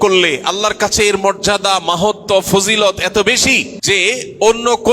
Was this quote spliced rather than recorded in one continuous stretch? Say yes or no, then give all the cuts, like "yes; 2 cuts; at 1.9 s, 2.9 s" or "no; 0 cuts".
yes; 1 cut; at 3.7 s